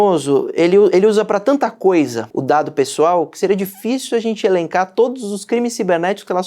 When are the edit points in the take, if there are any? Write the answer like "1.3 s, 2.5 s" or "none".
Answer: 2.3 s